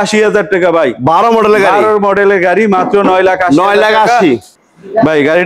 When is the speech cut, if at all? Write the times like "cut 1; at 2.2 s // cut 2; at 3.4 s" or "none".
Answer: cut 1; at 4.5 s

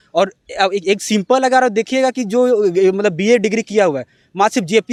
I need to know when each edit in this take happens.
none

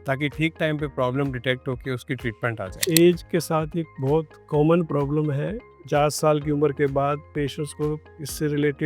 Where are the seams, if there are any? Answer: cut 1; at 2.9 s // cut 2; at 5.7 s // cut 3; at 7.3 s

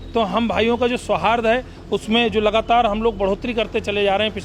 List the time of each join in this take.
none

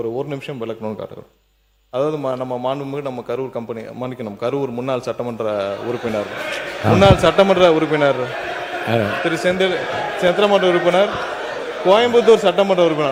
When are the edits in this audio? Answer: none

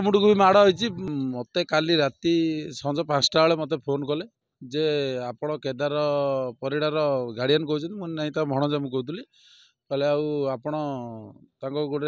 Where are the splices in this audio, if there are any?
cut 1; at 1.1 s

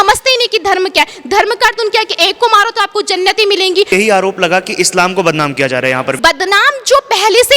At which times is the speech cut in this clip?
cut 1; at 3.9 s // cut 2; at 6.2 s

